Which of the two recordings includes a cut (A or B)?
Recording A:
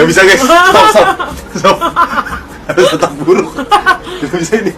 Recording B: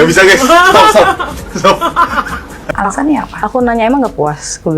B